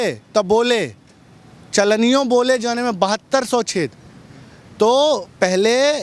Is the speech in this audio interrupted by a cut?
no; 0 cuts

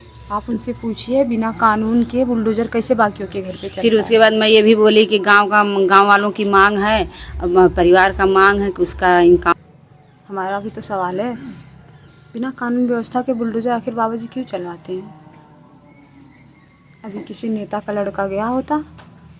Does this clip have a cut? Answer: yes; 1 cut; at 9.5 s

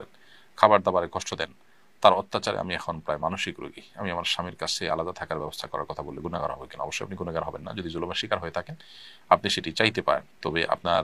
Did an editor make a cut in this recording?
no; 0 cuts

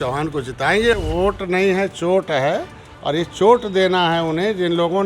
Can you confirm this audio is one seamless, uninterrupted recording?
no; 1 cut; at 0.9 s

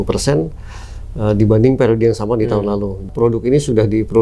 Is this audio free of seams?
no; 1 cut; at 3.1 s

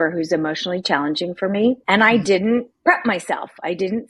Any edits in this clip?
yes; 1 cut; at 1.8 s

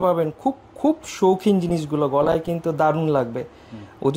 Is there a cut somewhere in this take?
no; 0 cuts

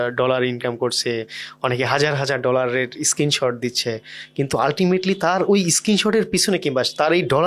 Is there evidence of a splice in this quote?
no; 0 cuts

